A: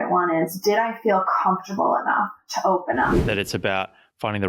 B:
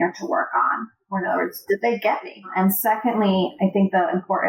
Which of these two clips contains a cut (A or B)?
A